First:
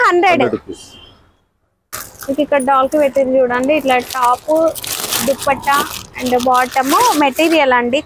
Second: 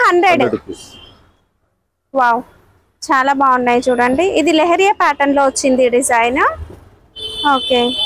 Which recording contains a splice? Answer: first; 1 cut; at 1.9 s

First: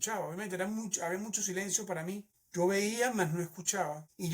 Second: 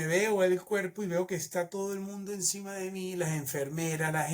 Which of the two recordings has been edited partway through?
first; 1 cut; at 2.3 s

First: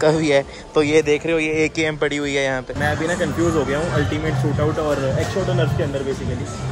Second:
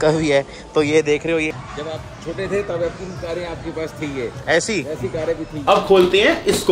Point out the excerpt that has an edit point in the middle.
second; 2 cuts; at 1.5 s, 5.5 s

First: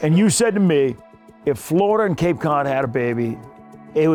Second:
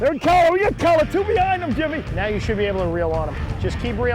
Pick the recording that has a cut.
second; 1 cut; at 2.1 s

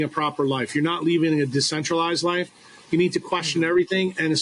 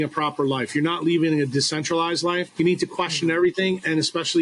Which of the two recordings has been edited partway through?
second; 1 cut; at 2.5 s

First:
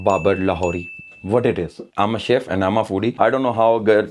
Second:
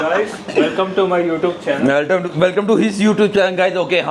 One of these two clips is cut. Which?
first; 1 cut; at 1.9 s

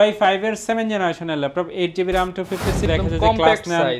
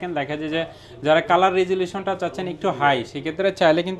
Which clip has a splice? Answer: first; 1 cut; at 2.9 s

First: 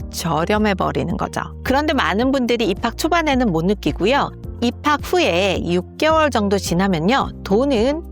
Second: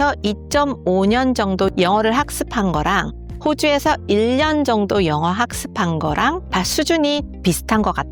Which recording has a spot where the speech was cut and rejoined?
first; 1 cut; at 1.5 s

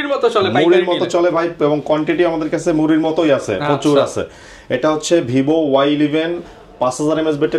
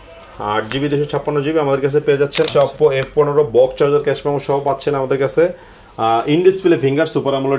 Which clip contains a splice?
second; 1 cut; at 2.5 s

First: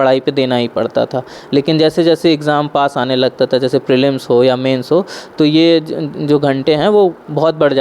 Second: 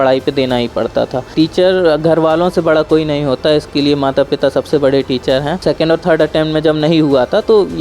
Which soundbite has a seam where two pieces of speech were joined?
second; 2 cuts; at 1.3 s, 5.5 s

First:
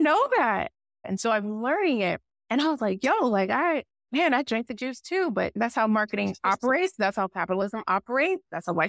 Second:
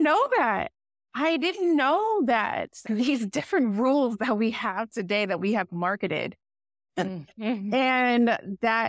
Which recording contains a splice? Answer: first; 4 cuts; at 1.0 s, 2.3 s, 4.0 s, 5.5 s

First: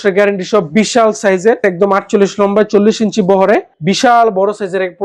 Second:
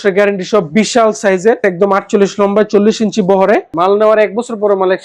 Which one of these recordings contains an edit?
second; 1 cut; at 3.7 s

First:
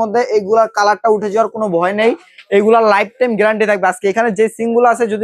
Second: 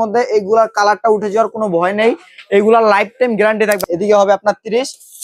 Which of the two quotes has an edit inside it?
second; 1 cut; at 3.8 s

